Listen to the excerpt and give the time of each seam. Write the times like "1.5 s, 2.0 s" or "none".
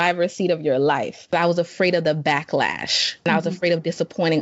1.3 s, 3.3 s